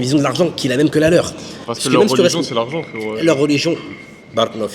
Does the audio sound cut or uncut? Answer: uncut